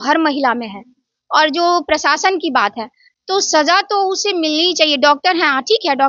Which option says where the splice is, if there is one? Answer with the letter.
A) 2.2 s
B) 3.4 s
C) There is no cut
C